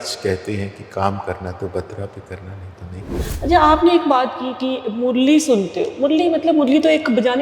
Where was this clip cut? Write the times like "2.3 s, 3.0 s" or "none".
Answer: 3.1 s